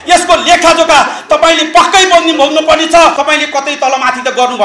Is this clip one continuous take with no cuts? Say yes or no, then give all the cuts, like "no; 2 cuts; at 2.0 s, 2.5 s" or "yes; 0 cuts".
no; 1 cut; at 3.2 s